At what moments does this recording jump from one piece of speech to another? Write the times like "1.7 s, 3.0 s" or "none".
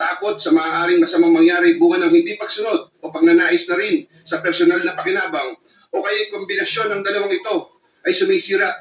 none